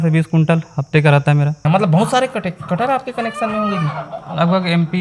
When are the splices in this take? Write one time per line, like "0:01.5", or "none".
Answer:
0:01.6